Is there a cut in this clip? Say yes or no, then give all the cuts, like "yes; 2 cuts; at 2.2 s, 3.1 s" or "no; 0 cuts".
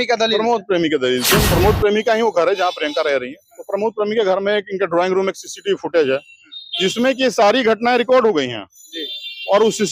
yes; 1 cut; at 1.5 s